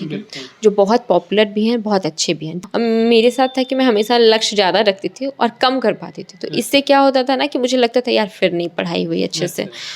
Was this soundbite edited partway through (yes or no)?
yes